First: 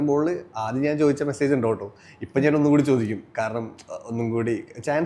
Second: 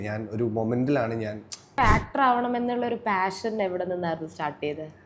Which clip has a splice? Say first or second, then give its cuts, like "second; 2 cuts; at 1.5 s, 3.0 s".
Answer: second; 1 cut; at 1.8 s